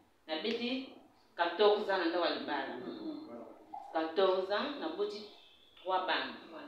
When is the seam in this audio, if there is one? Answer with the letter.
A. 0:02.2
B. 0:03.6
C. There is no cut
C